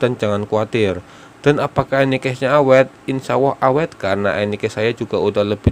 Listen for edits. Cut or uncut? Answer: uncut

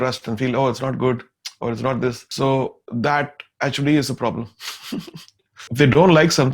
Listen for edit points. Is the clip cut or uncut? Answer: cut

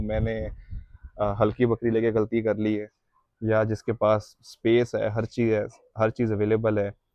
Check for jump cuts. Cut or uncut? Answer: uncut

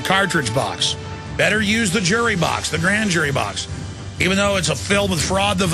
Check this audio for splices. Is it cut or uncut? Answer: uncut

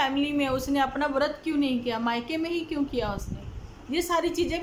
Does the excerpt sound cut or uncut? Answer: uncut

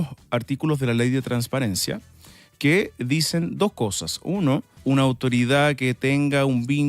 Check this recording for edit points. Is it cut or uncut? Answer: cut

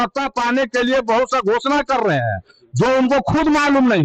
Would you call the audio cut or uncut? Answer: uncut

